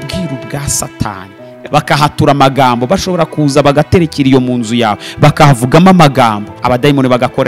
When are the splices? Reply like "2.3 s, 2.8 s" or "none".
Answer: 1.6 s, 6.5 s